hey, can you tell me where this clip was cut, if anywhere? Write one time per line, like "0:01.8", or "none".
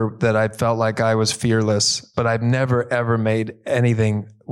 0:02.0

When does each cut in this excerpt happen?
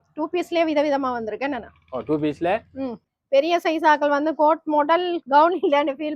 0:03.0

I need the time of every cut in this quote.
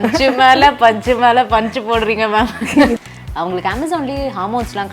0:02.8

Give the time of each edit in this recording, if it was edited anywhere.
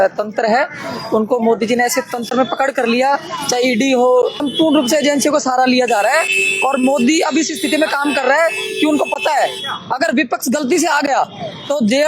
0:04.4

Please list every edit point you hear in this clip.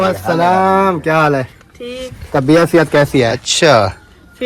0:03.4

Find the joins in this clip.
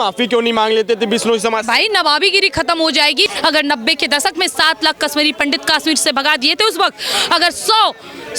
0:03.3

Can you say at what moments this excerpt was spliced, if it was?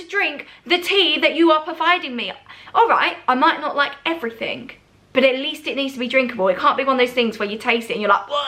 none

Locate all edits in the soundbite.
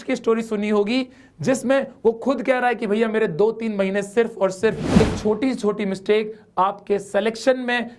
0:05.0

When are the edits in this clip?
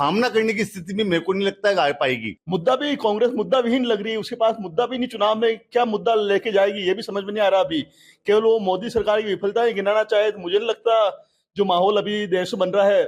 0:02.3

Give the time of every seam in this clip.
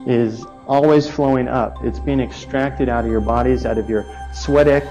none

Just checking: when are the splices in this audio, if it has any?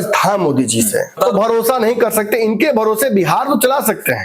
0:01.2

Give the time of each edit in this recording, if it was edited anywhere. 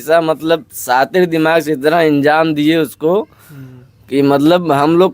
none

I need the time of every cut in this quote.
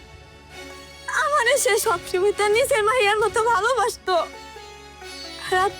0:01.0

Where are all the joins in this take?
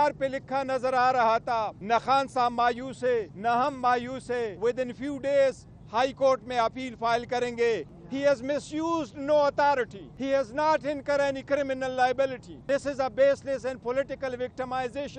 0:01.8
0:03.3
0:04.5
0:08.0
0:10.1
0:12.5

